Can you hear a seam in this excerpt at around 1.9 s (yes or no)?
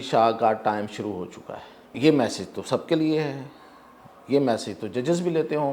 yes